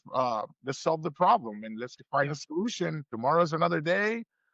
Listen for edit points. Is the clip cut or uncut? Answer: cut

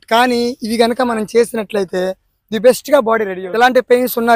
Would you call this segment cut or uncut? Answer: cut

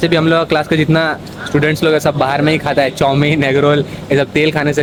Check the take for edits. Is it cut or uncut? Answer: uncut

